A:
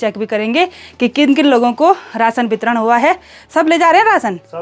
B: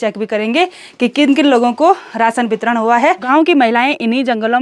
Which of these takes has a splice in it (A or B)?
B